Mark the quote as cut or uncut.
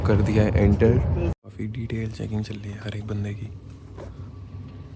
cut